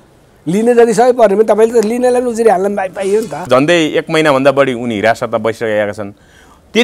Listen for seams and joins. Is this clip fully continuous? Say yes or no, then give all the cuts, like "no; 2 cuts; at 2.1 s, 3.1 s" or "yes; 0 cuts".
no; 1 cut; at 3.5 s